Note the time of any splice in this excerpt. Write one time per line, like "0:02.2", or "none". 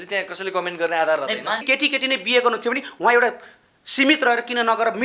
0:01.6